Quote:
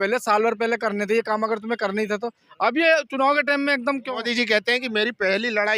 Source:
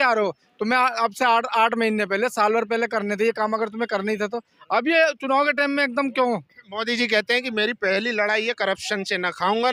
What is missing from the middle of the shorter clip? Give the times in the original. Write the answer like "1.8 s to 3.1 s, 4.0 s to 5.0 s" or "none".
6.1 s to 6.6 s